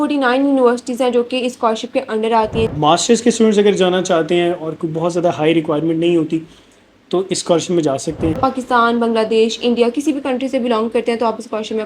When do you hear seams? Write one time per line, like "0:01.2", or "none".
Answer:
0:02.7
0:08.4